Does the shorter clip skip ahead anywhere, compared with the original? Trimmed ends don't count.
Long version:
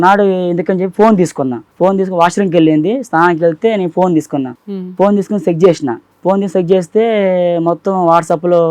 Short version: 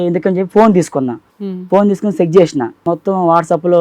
yes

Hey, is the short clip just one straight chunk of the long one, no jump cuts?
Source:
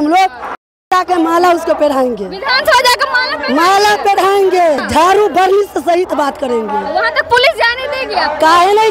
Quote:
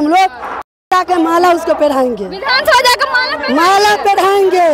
yes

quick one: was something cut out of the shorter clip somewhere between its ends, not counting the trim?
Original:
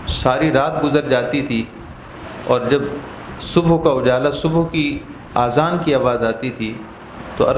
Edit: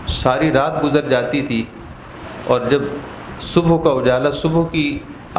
no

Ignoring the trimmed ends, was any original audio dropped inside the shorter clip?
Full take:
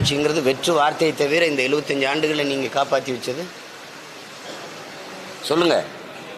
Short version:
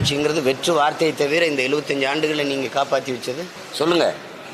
yes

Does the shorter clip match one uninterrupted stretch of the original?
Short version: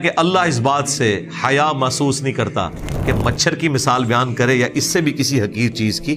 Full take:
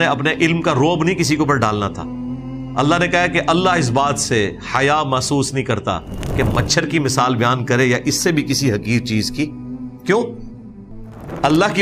yes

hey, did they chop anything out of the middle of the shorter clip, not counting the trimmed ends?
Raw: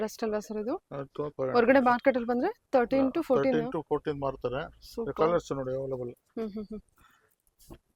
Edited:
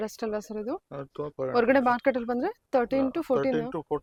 no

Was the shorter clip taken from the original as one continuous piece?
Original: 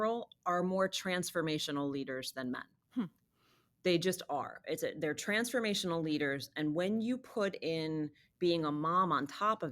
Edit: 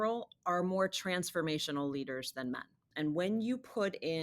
no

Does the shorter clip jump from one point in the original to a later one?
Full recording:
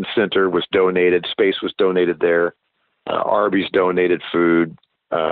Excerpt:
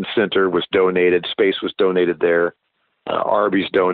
no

